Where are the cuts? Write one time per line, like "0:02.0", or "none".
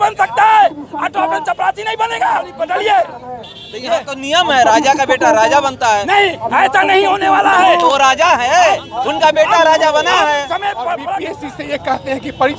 0:02.5
0:11.1